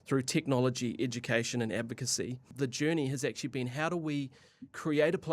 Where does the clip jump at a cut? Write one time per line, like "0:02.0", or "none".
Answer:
0:02.5